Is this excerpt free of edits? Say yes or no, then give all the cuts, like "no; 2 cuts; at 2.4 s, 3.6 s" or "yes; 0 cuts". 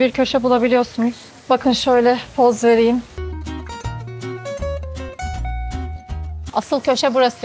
yes; 0 cuts